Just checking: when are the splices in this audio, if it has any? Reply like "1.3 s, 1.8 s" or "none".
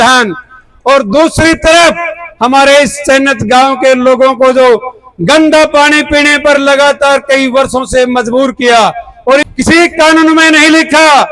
9.5 s